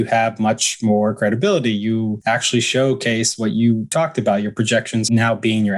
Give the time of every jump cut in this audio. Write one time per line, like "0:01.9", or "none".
0:02.2
0:03.9
0:05.0